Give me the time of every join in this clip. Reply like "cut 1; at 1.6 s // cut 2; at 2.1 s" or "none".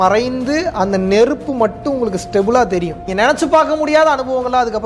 cut 1; at 3.0 s